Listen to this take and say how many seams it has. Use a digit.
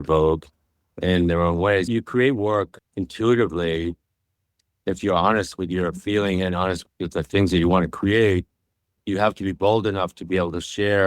3